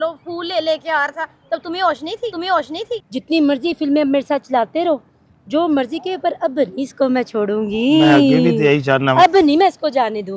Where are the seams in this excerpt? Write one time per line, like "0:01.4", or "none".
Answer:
0:03.0